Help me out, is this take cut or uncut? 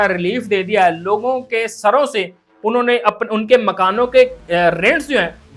uncut